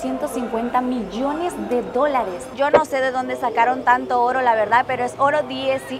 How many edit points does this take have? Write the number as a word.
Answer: one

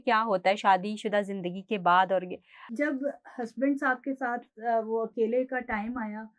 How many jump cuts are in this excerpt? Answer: one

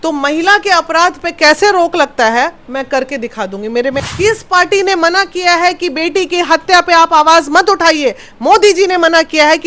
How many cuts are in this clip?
one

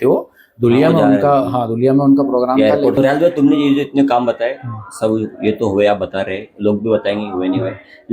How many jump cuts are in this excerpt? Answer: one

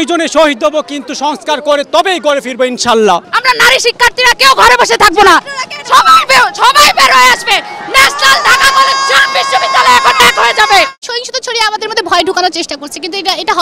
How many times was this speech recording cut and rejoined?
two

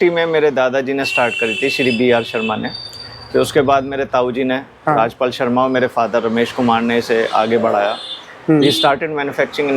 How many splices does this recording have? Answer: zero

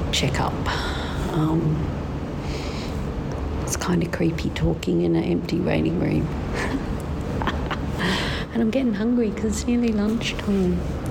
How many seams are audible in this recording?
zero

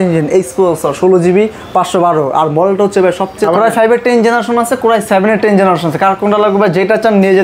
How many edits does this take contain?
one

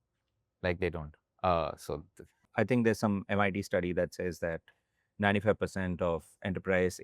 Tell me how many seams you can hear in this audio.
one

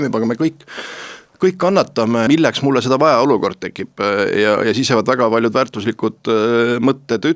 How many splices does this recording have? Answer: one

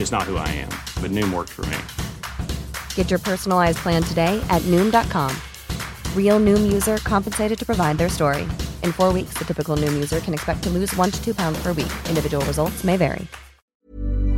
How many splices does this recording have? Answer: zero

